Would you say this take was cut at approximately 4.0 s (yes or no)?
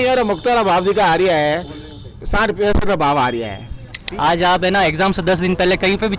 yes